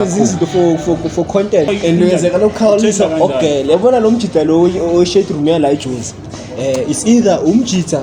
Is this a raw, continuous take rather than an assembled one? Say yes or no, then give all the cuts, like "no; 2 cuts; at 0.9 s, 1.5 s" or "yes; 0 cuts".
no; 1 cut; at 1.7 s